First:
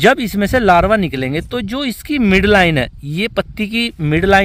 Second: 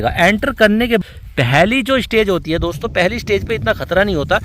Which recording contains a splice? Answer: second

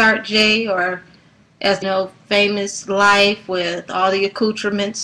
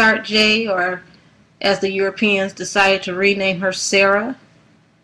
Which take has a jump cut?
second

